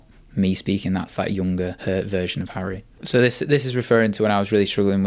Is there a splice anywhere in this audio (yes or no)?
yes